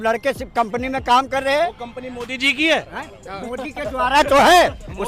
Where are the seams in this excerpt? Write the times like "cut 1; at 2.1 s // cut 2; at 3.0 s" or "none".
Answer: none